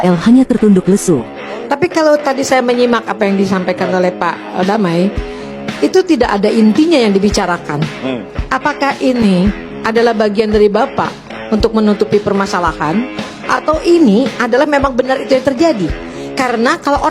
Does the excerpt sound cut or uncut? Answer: uncut